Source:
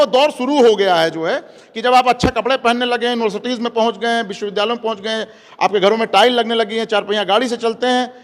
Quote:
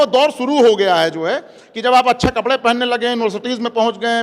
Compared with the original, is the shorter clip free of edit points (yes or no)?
yes